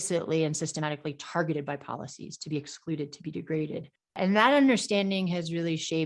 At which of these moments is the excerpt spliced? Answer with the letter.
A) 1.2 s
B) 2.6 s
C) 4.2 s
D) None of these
C